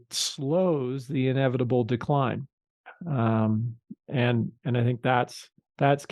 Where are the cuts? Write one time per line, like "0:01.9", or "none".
none